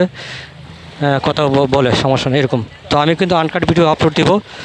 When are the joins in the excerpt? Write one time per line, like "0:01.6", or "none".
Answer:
none